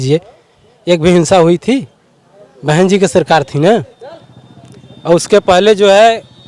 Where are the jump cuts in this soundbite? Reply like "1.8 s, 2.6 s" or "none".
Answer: none